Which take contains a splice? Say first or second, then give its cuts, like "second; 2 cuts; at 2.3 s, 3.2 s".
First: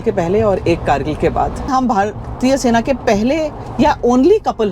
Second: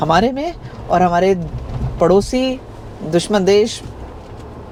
first; 1 cut; at 1.7 s